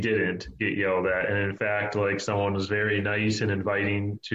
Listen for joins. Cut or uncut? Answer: uncut